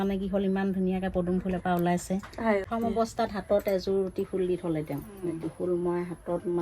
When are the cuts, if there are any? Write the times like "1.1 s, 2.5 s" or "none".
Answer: 2.7 s